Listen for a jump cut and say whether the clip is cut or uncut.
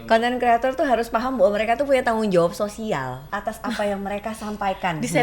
cut